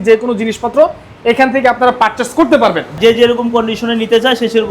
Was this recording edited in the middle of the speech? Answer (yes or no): yes